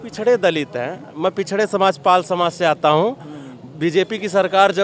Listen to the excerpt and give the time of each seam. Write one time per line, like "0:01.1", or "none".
none